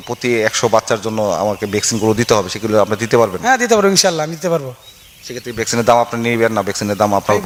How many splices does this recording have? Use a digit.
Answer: 0